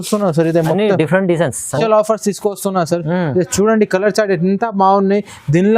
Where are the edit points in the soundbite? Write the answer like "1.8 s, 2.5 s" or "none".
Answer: 1.7 s